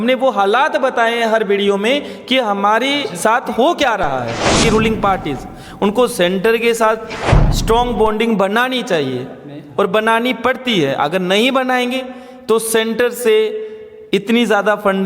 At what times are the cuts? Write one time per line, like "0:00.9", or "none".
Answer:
0:04.6